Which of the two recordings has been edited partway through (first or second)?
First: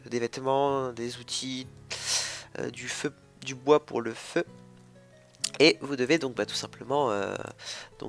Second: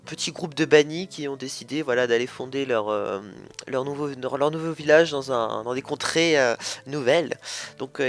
second